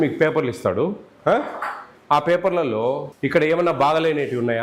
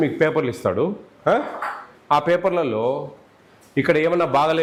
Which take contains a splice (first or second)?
first